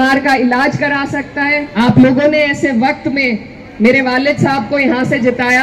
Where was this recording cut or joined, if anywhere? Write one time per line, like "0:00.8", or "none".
0:01.6